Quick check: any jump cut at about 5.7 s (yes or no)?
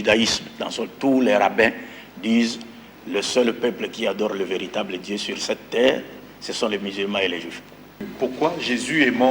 no